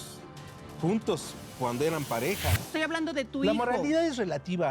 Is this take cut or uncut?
cut